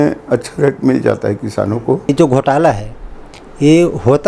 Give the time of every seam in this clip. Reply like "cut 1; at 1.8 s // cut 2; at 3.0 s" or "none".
cut 1; at 2.1 s

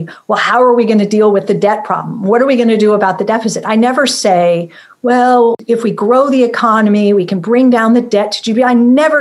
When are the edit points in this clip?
cut 1; at 5.6 s

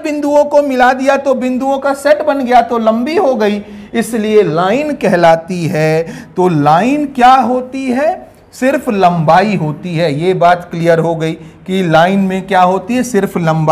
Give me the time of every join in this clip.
none

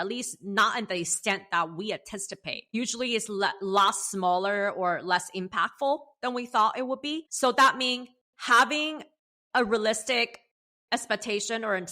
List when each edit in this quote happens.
cut 1; at 2.7 s // cut 2; at 7.2 s

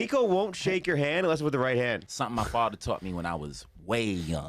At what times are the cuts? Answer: cut 1; at 2.0 s

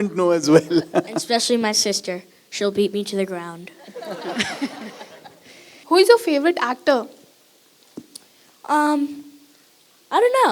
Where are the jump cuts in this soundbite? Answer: cut 1; at 5.7 s

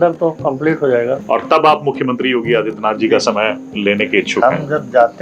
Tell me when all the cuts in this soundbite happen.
cut 1; at 1.2 s

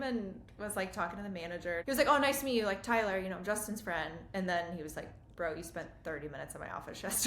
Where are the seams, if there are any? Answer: cut 1; at 1.8 s

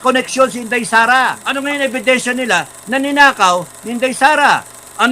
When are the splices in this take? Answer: cut 1; at 1.5 s

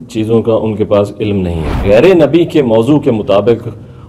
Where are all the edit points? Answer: cut 1; at 1.6 s

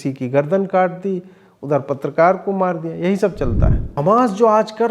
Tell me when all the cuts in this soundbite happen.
cut 1; at 4.0 s

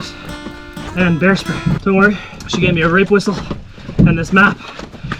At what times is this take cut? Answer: cut 1; at 1.8 s // cut 2; at 2.3 s

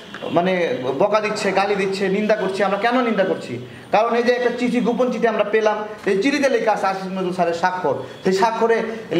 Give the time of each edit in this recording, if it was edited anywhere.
none

